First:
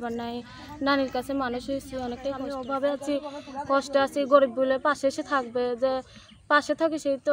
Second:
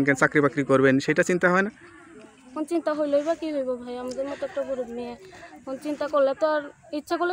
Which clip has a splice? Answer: first; 1 cut; at 2.5 s

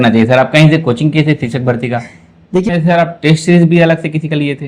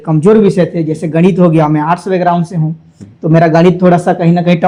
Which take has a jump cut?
first; 1 cut; at 2.6 s

